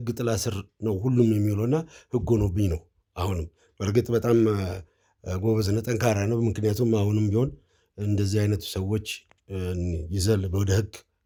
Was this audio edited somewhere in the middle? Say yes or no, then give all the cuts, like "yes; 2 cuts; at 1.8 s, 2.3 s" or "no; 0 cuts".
no; 0 cuts